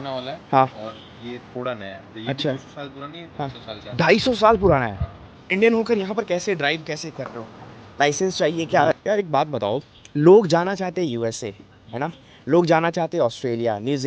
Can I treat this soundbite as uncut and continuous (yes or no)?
no